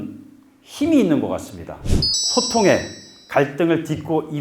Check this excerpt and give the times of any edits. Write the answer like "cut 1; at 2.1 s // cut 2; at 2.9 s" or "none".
cut 1; at 1.9 s